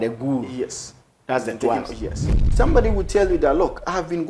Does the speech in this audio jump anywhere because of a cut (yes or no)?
yes